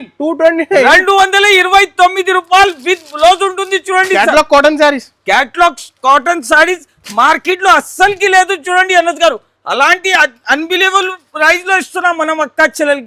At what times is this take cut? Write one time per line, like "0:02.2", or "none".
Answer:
none